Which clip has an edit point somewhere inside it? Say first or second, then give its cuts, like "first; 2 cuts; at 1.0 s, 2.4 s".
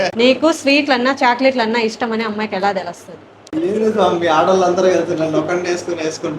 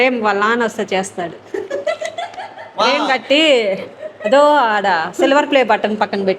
first; 1 cut; at 3.5 s